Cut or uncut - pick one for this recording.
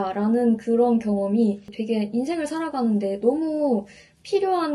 cut